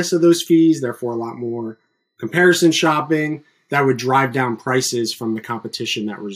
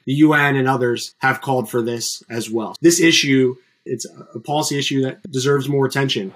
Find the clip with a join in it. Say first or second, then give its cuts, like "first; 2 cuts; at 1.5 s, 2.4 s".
second; 4 cuts; at 1.1 s, 2.7 s, 3.9 s, 5.2 s